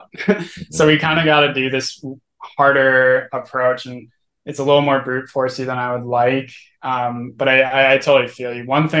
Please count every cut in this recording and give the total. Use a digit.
0